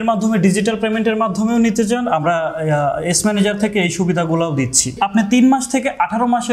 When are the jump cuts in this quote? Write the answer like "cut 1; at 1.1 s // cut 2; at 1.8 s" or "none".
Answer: cut 1; at 5.0 s